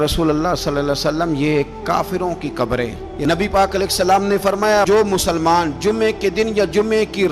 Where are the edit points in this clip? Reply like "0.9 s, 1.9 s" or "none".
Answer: 3.1 s